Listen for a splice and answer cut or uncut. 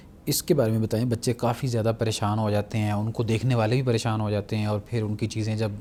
uncut